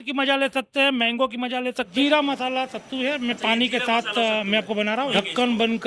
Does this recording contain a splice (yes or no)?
yes